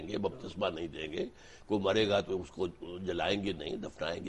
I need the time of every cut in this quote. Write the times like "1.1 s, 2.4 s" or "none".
none